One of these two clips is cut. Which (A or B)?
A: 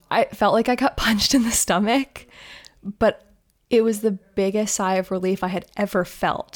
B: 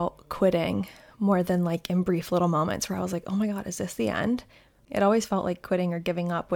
B